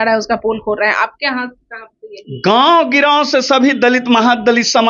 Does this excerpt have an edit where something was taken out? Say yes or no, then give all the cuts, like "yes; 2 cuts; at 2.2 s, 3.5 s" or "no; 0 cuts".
no; 0 cuts